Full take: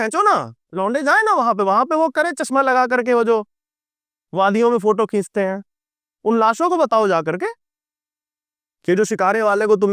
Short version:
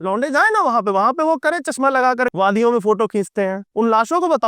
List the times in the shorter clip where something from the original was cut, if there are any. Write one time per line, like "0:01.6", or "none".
0:02.3
0:03.6